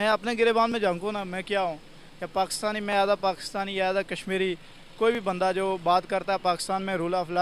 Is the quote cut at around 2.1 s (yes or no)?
no